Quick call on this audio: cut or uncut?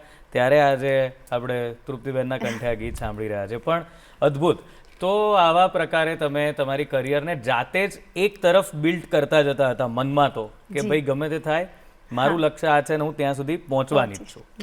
uncut